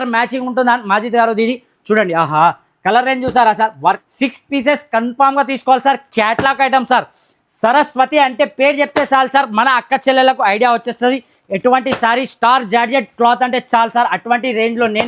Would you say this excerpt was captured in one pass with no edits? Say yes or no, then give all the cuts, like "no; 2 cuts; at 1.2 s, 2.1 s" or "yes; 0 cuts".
no; 1 cut; at 4.0 s